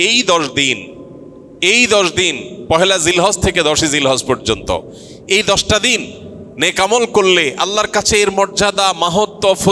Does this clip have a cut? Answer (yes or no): no